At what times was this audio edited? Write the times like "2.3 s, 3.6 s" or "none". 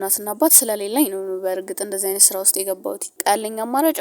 3.1 s